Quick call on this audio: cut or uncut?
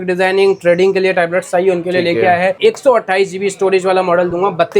cut